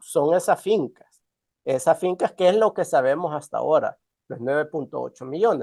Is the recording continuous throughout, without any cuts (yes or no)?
yes